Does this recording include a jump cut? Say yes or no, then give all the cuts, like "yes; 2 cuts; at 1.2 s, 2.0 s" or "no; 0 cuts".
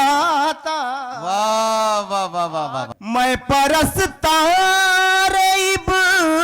yes; 1 cut; at 2.9 s